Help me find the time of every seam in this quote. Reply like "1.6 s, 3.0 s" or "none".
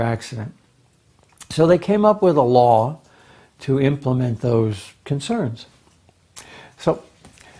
none